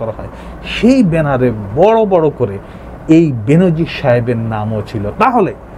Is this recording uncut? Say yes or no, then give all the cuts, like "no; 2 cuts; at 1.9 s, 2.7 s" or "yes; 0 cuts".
yes; 0 cuts